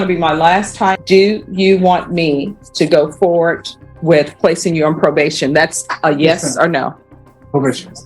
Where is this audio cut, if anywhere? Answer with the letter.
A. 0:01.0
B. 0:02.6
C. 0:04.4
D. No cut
A